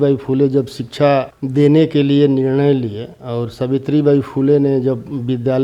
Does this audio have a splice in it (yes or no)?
yes